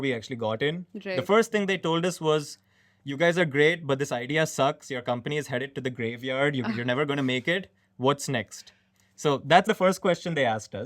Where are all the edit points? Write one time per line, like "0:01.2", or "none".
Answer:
0:09.6